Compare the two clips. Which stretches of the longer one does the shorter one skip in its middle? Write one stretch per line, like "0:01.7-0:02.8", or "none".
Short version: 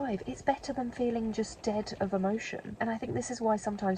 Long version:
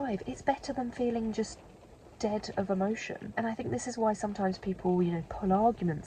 0:01.5-0:02.1